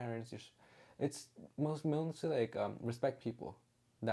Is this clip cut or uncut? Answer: uncut